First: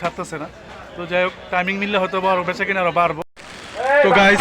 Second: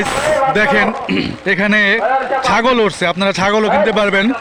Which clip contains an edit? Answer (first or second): first